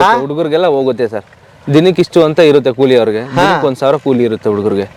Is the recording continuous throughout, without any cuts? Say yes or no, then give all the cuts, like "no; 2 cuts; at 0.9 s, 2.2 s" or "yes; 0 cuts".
yes; 0 cuts